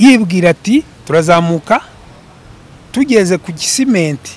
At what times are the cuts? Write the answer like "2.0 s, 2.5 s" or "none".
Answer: 1.0 s